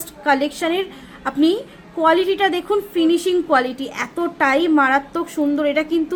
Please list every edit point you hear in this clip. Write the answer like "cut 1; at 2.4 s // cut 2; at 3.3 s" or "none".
none